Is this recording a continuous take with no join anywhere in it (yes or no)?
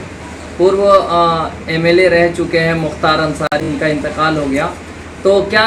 no